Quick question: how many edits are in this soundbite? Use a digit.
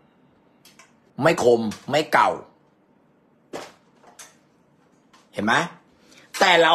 1